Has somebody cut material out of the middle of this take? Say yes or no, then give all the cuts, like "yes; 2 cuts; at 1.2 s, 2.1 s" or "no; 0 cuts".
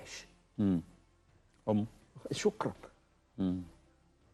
no; 0 cuts